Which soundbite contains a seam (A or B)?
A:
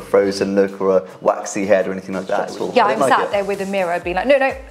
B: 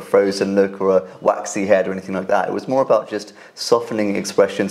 A